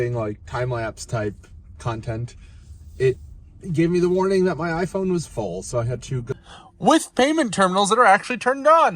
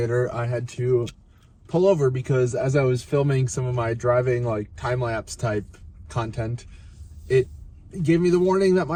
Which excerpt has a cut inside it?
first; 1 cut; at 6.3 s

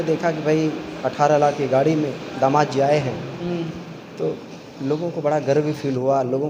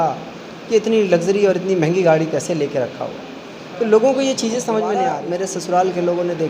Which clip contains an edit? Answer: second; 1 cut; at 5.2 s

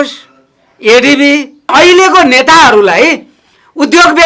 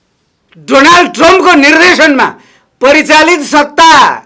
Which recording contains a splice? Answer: first; 1 cut; at 1.7 s

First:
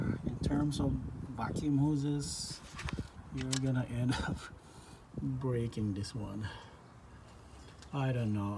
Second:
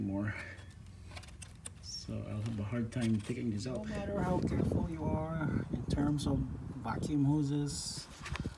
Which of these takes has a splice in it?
second; 1 cut; at 3.8 s

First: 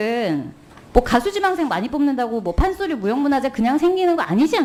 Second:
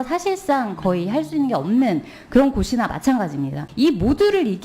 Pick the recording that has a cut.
second; 1 cut; at 3.6 s

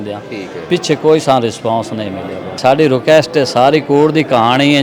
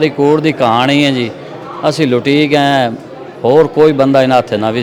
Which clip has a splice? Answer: first; 1 cut; at 2.6 s

